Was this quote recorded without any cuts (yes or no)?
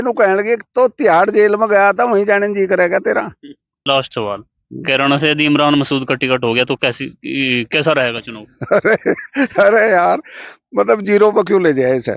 no